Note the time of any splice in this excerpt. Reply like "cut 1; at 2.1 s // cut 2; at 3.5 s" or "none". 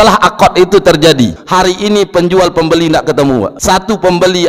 cut 1; at 1.4 s // cut 2; at 3.6 s